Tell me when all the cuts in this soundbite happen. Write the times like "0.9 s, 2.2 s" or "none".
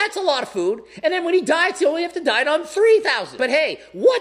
3.2 s